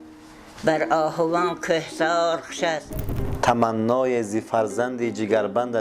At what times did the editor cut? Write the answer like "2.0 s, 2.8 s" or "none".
3.2 s